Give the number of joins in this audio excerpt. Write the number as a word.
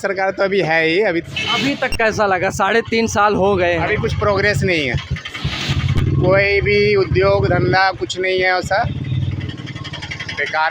one